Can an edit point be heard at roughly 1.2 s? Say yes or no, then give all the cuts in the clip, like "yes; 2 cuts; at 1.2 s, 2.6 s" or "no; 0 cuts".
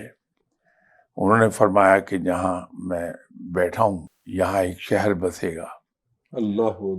no; 1 cut; at 4.1 s